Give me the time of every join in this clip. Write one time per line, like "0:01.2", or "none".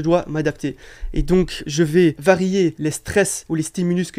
0:01.6
0:03.1